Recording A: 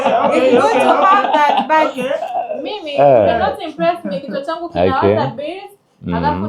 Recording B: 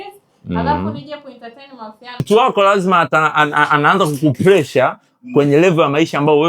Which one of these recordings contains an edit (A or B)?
B